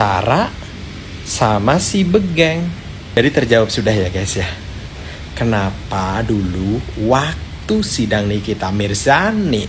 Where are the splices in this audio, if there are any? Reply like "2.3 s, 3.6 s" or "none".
3.2 s